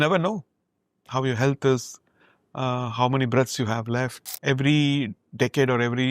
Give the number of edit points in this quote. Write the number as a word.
one